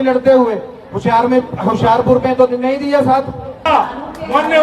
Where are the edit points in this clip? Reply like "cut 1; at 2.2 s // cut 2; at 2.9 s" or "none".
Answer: cut 1; at 3.6 s